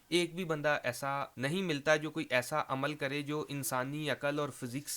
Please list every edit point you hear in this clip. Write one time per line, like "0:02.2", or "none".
0:01.3

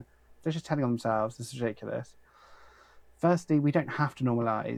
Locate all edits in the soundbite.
none

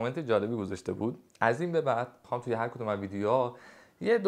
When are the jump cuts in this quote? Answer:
0:02.2

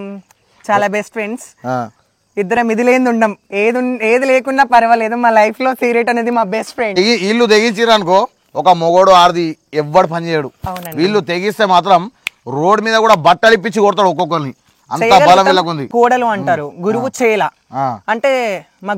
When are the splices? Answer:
0:07.0
0:15.9

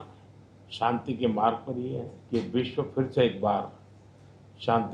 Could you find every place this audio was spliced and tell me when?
0:02.1

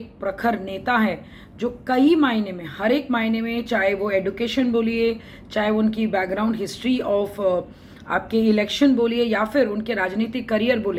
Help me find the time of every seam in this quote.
none

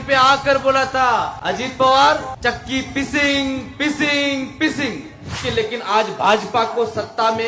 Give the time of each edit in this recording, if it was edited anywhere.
0:01.3
0:02.3
0:05.4

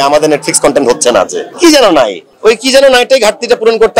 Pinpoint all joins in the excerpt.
0:01.4
0:02.2

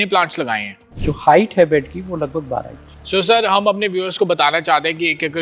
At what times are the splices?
0:01.0

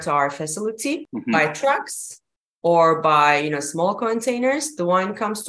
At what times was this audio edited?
0:01.0

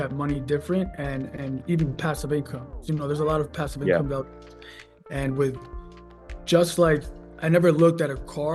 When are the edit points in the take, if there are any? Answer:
none

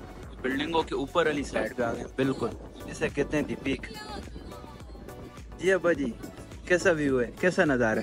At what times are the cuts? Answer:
none

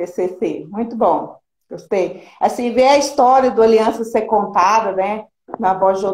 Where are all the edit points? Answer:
0:04.9

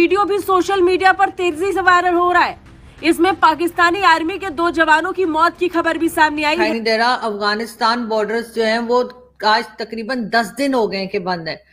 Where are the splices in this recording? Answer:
0:06.7

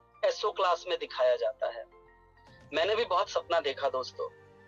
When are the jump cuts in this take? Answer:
none

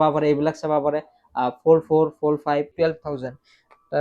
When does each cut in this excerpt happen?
0:02.7

